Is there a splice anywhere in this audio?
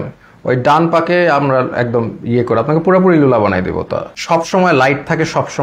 yes; 1 cut; at 4.0 s

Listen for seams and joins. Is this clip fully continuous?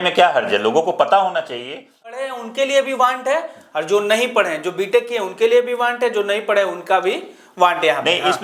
no; 1 cut; at 2.3 s

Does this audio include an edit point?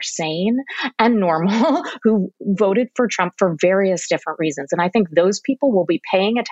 no; 0 cuts

